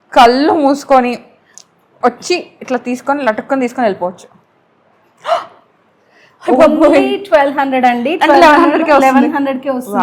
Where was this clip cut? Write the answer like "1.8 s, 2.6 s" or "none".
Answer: none